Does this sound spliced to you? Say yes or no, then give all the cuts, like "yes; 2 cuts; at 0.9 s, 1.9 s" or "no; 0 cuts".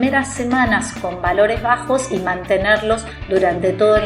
yes; 1 cut; at 3.1 s